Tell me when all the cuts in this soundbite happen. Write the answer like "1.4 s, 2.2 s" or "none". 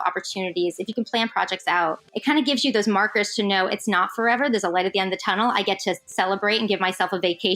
2.1 s